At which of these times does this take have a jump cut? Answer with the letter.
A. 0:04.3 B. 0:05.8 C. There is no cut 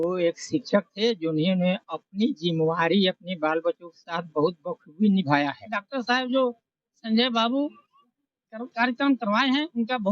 B